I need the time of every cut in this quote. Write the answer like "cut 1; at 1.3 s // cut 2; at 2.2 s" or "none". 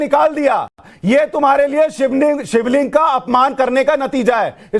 none